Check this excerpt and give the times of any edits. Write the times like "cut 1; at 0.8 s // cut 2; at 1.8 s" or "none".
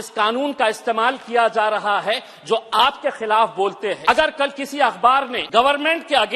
cut 1; at 4.0 s // cut 2; at 5.4 s

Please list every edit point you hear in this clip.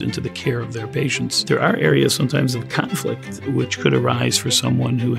cut 1; at 3.3 s

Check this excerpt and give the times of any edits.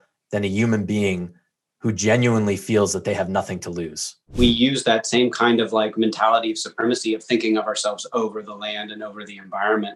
cut 1; at 4.3 s

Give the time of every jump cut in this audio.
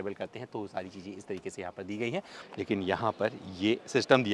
cut 1; at 2.4 s

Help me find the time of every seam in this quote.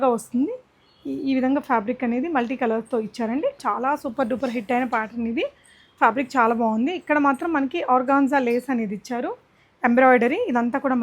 cut 1; at 3.6 s

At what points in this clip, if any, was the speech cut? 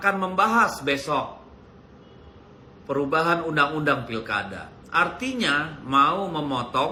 none

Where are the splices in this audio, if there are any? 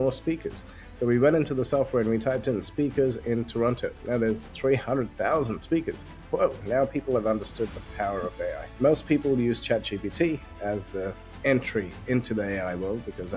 cut 1; at 4.0 s // cut 2; at 6.6 s // cut 3; at 8.6 s

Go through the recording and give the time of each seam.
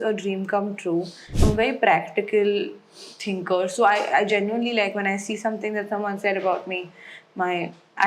cut 1; at 1.2 s

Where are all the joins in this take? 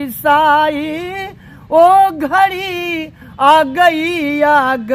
none

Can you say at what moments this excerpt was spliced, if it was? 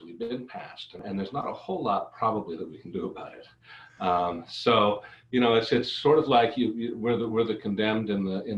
cut 1; at 1.0 s

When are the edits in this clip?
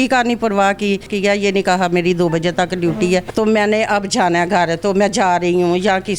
cut 1; at 1.1 s // cut 2; at 3.3 s

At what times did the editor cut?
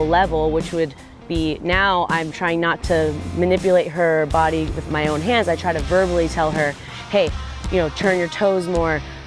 cut 1; at 2.8 s

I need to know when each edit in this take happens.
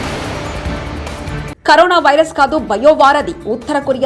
cut 1; at 1.5 s

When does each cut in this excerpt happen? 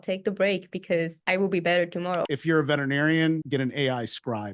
cut 1; at 1.2 s // cut 2; at 2.3 s // cut 3; at 3.4 s

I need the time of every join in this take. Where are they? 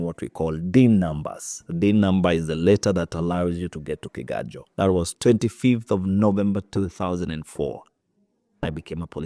cut 1; at 5.1 s

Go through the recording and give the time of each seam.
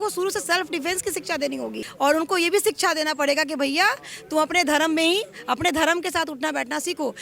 cut 1; at 1.8 s

